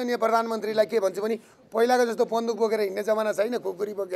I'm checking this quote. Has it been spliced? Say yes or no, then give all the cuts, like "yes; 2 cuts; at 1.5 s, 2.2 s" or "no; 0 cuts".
yes; 1 cut; at 1.5 s